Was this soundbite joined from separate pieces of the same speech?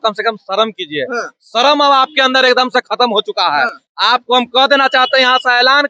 no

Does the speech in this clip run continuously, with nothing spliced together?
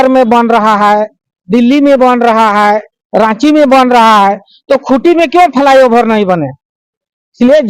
yes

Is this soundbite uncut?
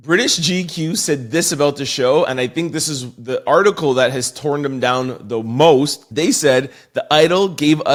yes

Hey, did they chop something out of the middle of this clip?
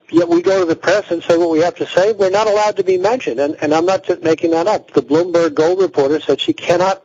no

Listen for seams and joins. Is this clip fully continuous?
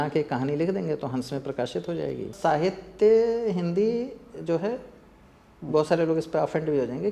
no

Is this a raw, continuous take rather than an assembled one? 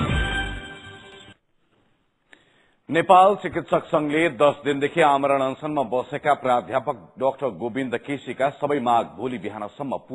no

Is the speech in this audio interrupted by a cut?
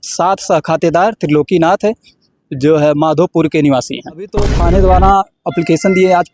yes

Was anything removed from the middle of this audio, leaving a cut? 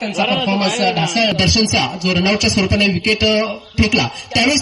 yes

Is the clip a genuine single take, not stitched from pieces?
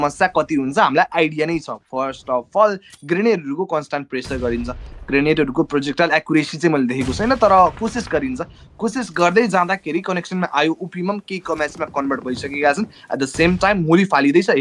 yes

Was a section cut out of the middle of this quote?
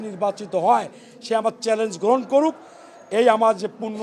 no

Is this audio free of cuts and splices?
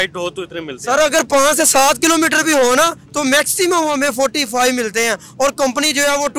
yes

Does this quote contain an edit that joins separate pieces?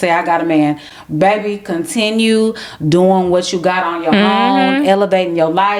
no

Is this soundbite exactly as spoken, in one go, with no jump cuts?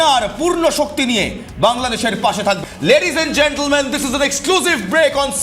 no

